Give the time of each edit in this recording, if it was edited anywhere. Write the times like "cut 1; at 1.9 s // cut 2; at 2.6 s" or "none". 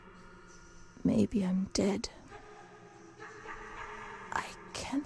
none